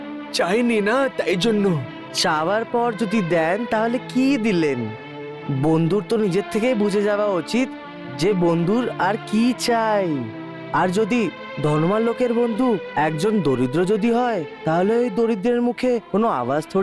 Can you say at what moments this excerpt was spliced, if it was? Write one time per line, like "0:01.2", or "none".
none